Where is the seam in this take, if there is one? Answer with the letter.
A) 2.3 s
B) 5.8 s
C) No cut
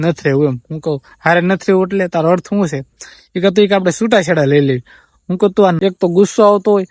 B